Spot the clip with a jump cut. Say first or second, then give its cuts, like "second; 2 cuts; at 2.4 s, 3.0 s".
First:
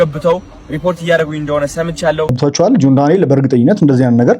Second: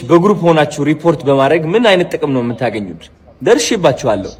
first; 1 cut; at 2.4 s